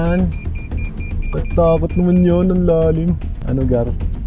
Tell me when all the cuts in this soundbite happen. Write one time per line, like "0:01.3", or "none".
0:03.3